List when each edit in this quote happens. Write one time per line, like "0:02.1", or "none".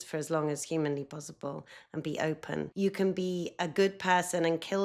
0:02.7